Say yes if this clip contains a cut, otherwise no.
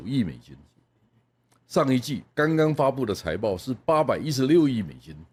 no